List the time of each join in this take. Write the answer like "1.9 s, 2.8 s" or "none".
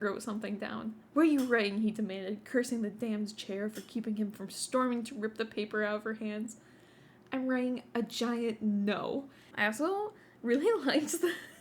9.4 s